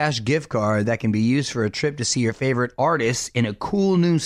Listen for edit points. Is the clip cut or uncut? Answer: uncut